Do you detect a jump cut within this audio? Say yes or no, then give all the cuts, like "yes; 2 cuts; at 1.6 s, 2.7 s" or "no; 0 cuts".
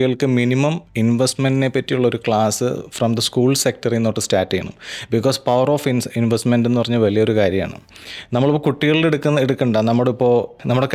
no; 0 cuts